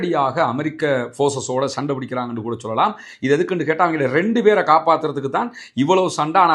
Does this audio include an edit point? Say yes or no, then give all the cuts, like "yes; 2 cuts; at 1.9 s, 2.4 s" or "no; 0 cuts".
no; 0 cuts